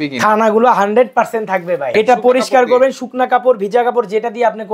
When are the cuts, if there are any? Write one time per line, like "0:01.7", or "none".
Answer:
0:01.9